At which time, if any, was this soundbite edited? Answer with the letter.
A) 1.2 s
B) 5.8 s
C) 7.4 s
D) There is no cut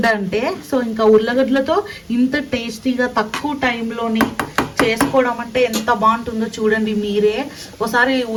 D